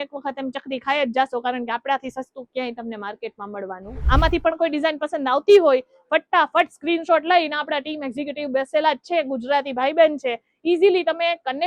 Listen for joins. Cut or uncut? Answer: cut